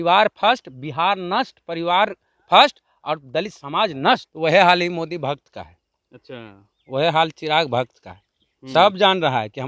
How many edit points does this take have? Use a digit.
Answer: 1